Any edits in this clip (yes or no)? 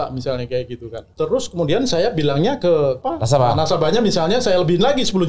yes